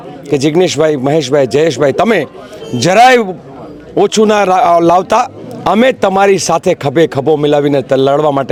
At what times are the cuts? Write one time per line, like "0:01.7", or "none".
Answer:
none